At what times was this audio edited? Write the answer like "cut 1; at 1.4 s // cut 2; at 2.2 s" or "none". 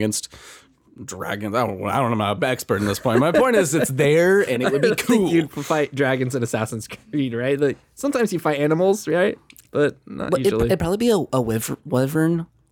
none